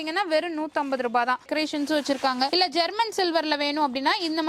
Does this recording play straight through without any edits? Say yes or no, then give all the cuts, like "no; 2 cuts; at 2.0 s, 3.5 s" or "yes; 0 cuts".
no; 1 cut; at 1.4 s